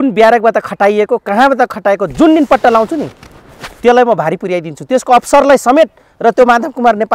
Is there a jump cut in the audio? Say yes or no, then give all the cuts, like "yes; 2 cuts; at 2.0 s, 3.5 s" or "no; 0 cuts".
no; 0 cuts